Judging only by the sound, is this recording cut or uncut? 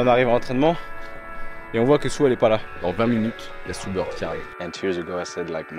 cut